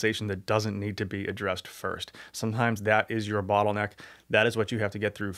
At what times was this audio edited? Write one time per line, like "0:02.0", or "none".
none